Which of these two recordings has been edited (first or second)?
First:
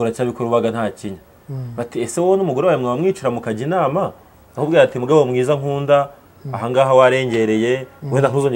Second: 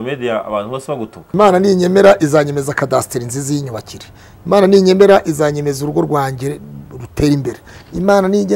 second